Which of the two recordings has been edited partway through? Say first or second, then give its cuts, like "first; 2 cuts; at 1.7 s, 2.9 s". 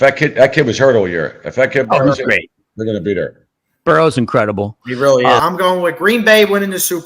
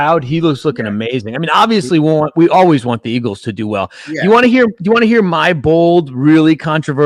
first; 1 cut; at 5.4 s